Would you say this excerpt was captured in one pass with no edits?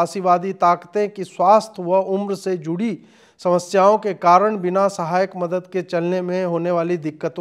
yes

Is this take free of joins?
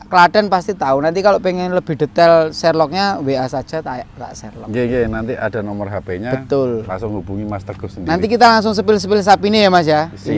yes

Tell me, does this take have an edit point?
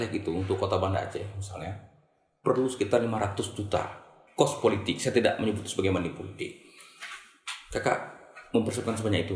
no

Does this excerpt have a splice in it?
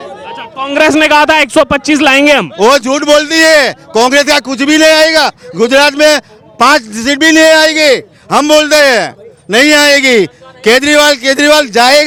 no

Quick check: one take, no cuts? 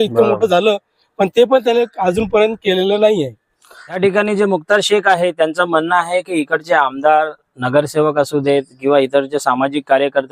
yes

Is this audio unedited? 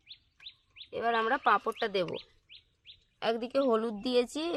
yes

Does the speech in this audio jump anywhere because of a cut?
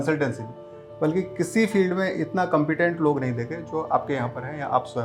no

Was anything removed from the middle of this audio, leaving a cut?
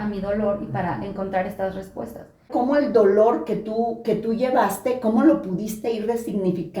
yes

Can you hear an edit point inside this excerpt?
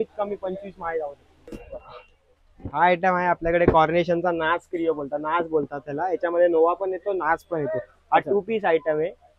no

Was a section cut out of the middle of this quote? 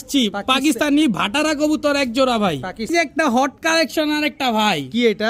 yes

